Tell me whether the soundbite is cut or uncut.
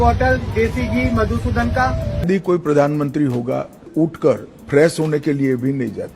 cut